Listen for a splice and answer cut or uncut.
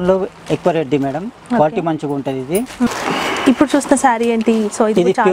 cut